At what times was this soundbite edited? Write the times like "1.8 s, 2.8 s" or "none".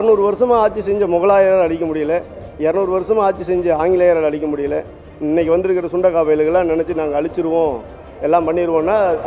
none